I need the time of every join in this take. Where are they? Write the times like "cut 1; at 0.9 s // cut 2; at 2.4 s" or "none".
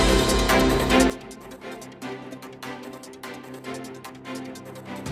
cut 1; at 1.1 s // cut 2; at 2.9 s // cut 3; at 4.4 s